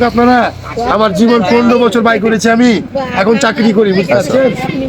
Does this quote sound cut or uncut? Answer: uncut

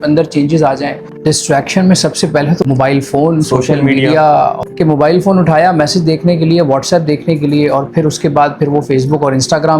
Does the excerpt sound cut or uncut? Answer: cut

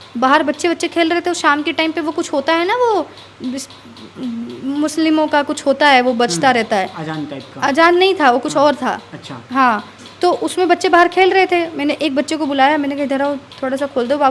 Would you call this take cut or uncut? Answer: uncut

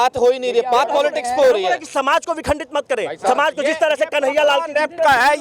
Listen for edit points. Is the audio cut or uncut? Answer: uncut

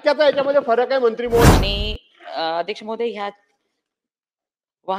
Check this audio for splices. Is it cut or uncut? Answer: cut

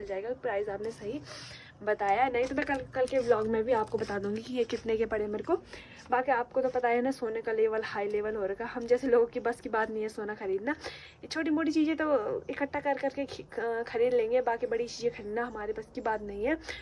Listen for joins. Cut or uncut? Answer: uncut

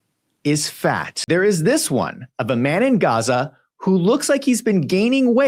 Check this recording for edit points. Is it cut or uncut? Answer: cut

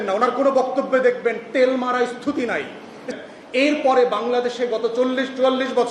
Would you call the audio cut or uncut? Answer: cut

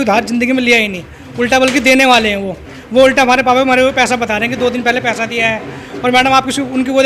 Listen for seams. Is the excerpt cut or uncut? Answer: uncut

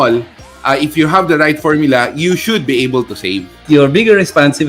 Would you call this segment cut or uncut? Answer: cut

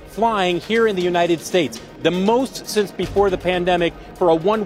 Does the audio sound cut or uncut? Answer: uncut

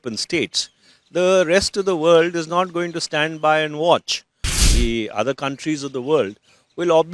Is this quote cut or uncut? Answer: cut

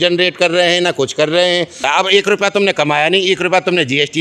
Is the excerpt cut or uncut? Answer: cut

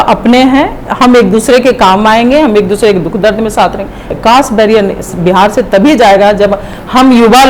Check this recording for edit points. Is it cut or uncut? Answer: cut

